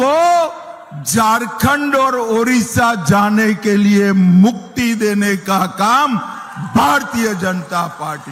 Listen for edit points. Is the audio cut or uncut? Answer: uncut